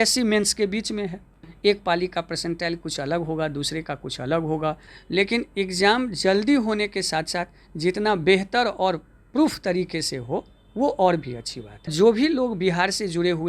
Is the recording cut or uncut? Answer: cut